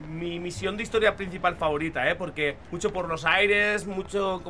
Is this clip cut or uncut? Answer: cut